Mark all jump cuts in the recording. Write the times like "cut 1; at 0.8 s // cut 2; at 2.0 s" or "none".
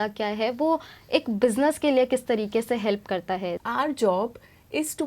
cut 1; at 3.6 s

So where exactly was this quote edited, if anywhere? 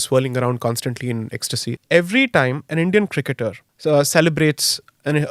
cut 1; at 1.7 s // cut 2; at 3.6 s

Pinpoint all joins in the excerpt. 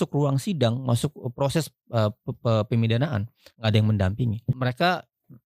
cut 1; at 4.5 s

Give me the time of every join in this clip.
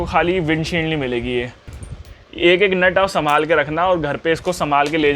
cut 1; at 1.8 s

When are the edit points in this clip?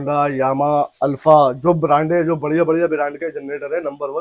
none

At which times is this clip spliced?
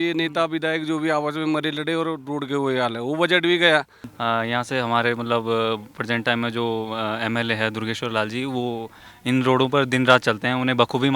cut 1; at 4.1 s

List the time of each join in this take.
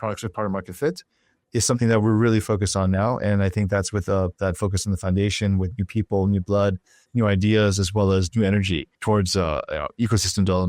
cut 1; at 8.9 s

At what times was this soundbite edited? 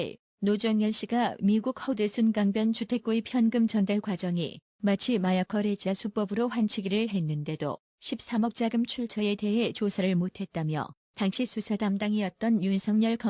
cut 1; at 12.2 s

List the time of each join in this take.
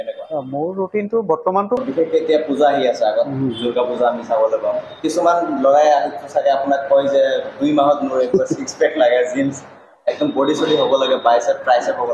cut 1; at 1.8 s

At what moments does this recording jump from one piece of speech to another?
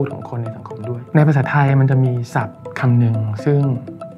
cut 1; at 1.0 s // cut 2; at 2.6 s

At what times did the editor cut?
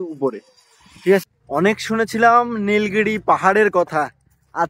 cut 1; at 1.4 s

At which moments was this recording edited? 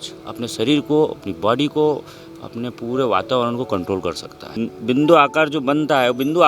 cut 1; at 4.7 s

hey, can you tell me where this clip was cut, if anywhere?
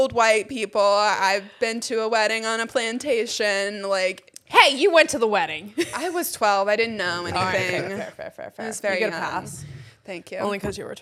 none

